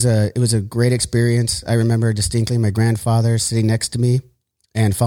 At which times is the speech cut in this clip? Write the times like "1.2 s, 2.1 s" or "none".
none